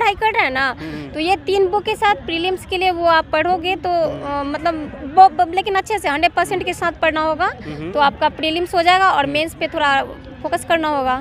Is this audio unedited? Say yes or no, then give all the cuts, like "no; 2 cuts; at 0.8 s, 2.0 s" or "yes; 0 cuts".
yes; 0 cuts